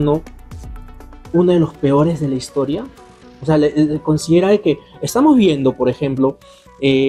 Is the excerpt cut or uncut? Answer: uncut